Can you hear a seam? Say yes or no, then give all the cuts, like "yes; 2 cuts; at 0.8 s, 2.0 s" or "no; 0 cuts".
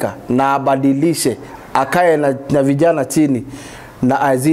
no; 0 cuts